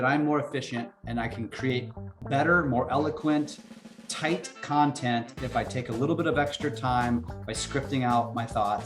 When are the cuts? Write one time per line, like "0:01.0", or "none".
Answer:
0:01.7